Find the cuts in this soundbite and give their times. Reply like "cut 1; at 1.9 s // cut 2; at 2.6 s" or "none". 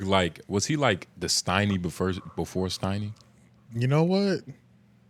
none